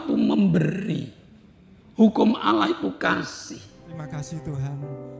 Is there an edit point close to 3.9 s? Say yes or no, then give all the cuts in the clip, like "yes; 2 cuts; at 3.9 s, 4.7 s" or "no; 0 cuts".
yes; 1 cut; at 3.9 s